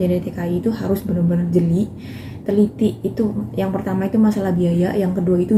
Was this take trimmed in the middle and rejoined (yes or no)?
no